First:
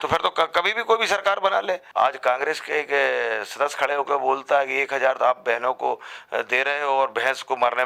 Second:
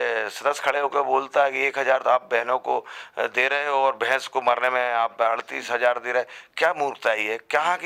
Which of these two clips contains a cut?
first; 1 cut; at 1.8 s

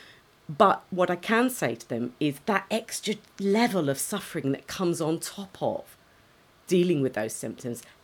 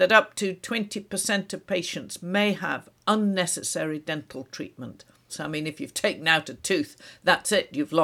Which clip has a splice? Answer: second; 1 cut; at 5.3 s

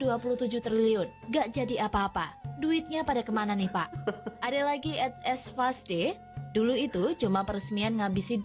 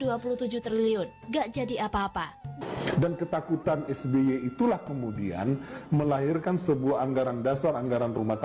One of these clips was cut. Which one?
second; 1 cut; at 2.6 s

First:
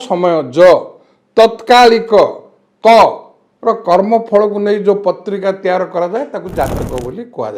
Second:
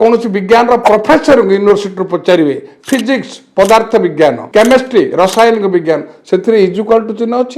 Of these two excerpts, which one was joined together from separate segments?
second; 1 cut; at 4.4 s

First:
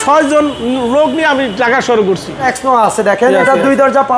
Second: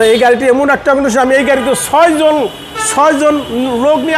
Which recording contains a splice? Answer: first; 1 cut; at 2.4 s

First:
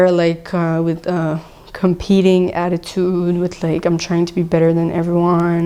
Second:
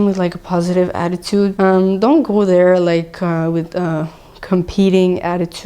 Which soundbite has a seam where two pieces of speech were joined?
second; 1 cut; at 1.5 s

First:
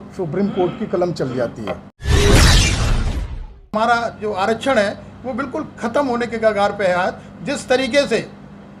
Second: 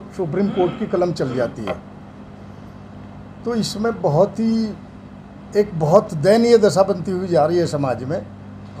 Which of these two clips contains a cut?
first; 2 cuts; at 2.0 s, 3.7 s

